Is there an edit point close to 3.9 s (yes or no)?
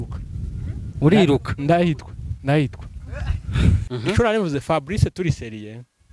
yes